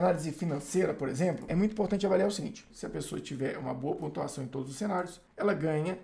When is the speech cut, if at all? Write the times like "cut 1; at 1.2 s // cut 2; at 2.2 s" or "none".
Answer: cut 1; at 1.5 s // cut 2; at 2.7 s